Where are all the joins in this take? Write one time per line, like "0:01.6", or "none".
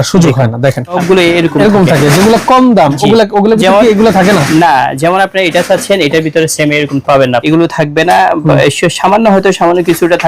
0:01.0
0:07.4